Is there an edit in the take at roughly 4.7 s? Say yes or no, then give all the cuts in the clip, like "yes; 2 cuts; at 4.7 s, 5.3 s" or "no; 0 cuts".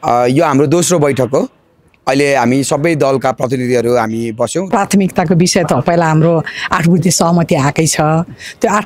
yes; 1 cut; at 4.7 s